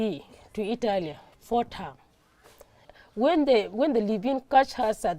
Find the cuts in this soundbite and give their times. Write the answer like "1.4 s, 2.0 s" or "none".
2.9 s